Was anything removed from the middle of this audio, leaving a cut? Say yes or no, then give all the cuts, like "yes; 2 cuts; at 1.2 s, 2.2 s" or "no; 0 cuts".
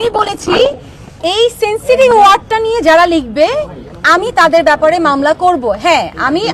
no; 0 cuts